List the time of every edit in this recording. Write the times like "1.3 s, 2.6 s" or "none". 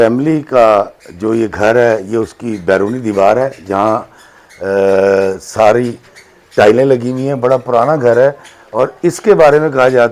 none